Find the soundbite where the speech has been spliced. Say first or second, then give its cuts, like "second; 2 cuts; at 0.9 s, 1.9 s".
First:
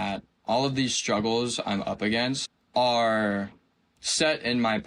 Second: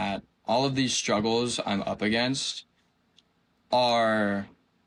first; 1 cut; at 2.5 s